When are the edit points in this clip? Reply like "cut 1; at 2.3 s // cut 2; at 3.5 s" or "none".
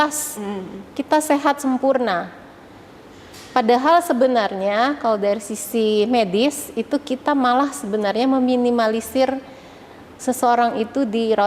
none